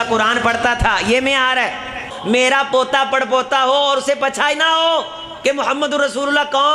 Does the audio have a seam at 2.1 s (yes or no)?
yes